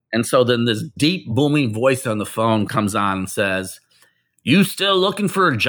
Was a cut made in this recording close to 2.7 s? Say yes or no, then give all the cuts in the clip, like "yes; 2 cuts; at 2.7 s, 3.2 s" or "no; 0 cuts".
yes; 2 cuts; at 0.9 s, 2.7 s